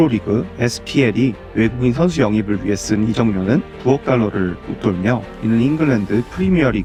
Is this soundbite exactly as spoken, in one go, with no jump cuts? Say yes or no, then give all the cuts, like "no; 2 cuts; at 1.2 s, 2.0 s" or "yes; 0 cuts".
yes; 0 cuts